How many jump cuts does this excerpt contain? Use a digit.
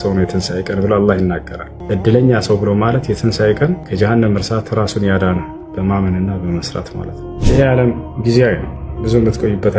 0